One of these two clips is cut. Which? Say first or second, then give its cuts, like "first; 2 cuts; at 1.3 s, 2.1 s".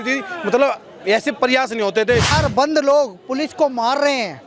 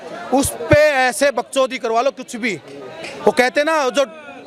first; 1 cut; at 2.3 s